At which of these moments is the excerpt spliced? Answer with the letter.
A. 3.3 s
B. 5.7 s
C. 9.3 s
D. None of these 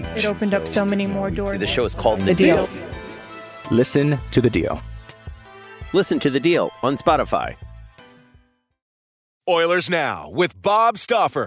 C